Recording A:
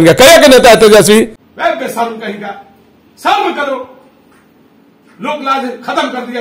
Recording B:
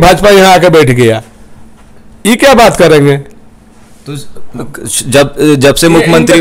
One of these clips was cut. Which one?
A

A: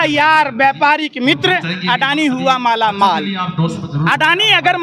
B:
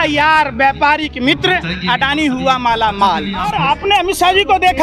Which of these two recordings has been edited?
B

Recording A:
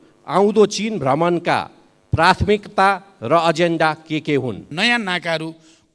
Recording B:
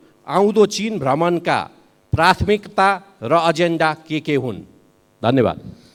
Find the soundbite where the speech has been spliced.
A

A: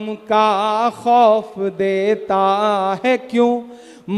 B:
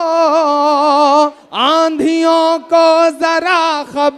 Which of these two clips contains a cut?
B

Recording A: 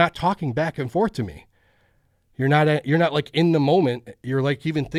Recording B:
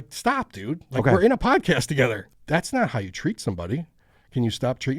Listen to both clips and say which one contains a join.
B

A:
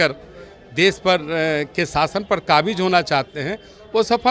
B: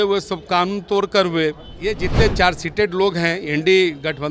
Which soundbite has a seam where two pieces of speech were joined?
B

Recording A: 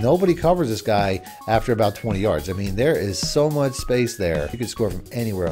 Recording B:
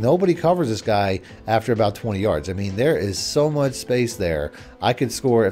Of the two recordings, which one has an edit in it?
A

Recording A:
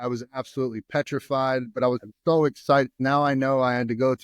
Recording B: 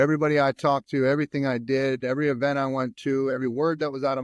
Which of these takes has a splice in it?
A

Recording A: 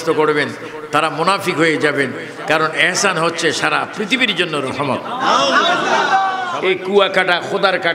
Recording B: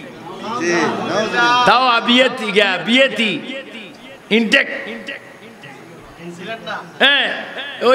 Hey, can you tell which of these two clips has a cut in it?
A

